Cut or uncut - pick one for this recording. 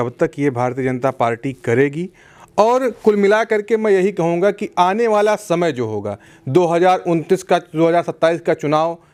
uncut